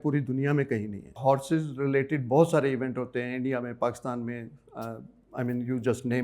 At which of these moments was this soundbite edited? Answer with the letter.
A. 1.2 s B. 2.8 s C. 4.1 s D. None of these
A